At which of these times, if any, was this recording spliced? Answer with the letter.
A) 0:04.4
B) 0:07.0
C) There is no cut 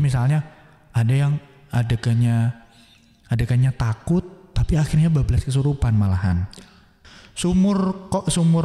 B